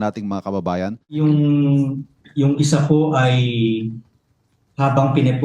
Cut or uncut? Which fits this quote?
cut